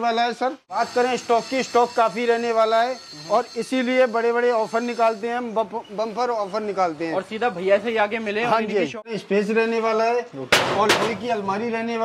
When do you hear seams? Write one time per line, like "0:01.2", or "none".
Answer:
0:00.8
0:09.1

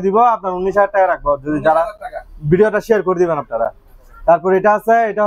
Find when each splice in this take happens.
none

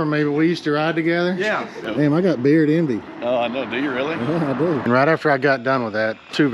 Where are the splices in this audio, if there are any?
0:01.8
0:04.8

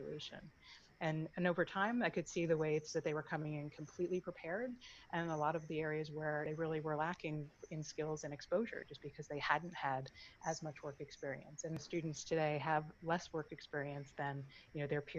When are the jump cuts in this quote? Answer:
0:06.5
0:11.8

